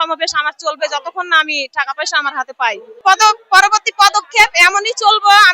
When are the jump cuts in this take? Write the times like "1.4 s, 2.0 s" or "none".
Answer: 2.9 s